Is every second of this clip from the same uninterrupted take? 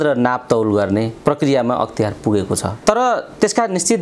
no; 2 cuts; at 1.1 s, 2.7 s

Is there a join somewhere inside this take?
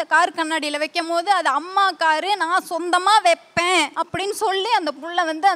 yes; 1 cut; at 4.0 s

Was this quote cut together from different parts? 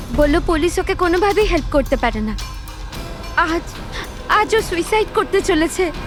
no; 0 cuts

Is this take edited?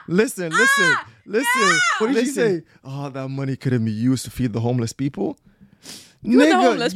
yes; 1 cut; at 2.0 s

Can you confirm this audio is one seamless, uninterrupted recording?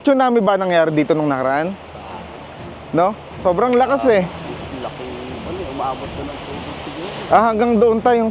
yes; 0 cuts

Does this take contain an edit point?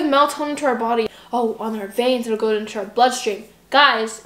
yes; 1 cut; at 1.2 s

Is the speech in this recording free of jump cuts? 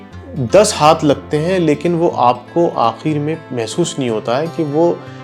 yes; 0 cuts

